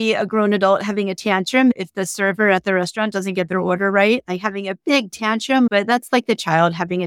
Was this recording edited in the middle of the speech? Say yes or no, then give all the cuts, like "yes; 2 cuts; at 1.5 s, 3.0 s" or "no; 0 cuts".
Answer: yes; 2 cuts; at 1.7 s, 5.7 s